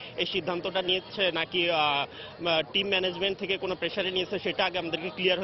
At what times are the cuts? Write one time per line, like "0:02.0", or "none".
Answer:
none